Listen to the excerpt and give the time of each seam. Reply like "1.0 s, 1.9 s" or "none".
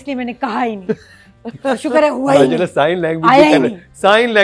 none